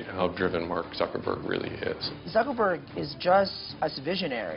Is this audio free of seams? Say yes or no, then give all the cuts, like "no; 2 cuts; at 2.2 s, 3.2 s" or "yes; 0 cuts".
no; 2 cuts; at 2.1 s, 3.6 s